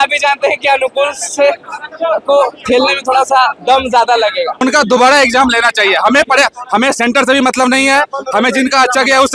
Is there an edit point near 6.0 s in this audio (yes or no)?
no